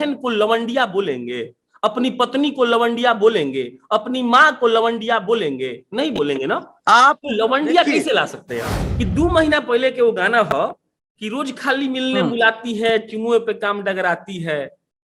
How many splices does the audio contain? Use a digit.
1